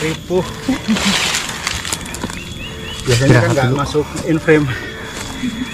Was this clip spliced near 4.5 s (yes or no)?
no